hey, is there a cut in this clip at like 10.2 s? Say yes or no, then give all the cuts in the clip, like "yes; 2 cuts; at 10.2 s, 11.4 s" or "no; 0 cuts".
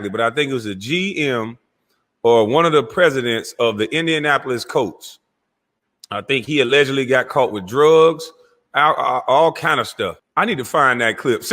yes; 1 cut; at 10.2 s